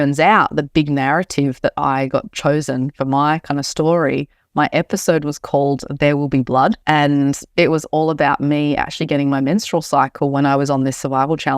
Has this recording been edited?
yes; 1 cut; at 6.8 s

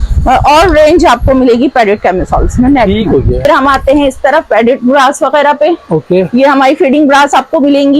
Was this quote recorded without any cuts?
yes; 0 cuts

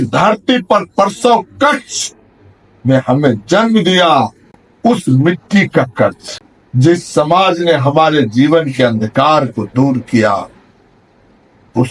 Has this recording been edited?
no; 0 cuts

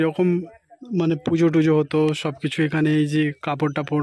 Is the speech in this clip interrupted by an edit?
no; 0 cuts

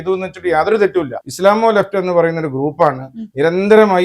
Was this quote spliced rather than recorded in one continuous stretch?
yes; 1 cut; at 1.2 s

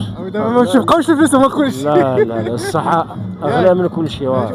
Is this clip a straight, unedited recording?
yes; 0 cuts

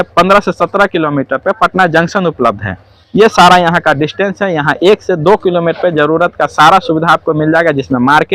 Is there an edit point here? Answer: no; 0 cuts

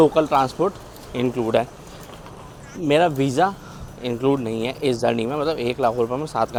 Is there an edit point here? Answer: no; 0 cuts

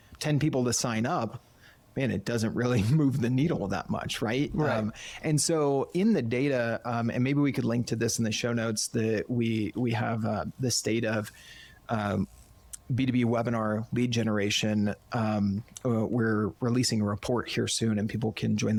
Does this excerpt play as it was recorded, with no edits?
yes; 0 cuts

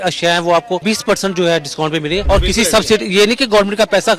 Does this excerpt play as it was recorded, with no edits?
no; 2 cuts; at 0.8 s, 2.2 s

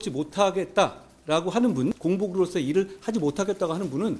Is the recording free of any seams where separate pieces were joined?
no; 1 cut; at 2.0 s

